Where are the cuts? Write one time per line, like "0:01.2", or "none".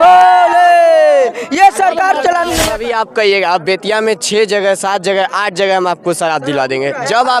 0:02.7